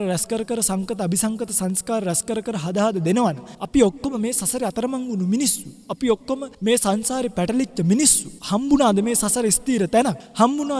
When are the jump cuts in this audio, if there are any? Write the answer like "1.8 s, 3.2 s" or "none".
none